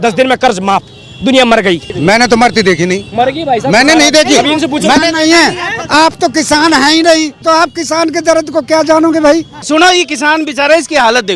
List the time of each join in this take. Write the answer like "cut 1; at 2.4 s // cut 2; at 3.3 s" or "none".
cut 1; at 1.9 s // cut 2; at 7.4 s // cut 3; at 9.6 s